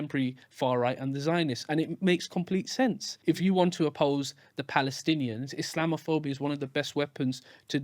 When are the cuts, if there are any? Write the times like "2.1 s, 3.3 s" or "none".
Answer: 3.1 s, 3.9 s